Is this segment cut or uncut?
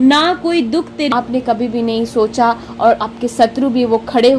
cut